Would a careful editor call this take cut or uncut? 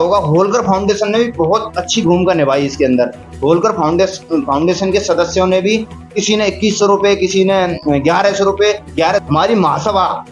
cut